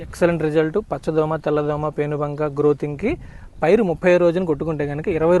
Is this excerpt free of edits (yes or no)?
yes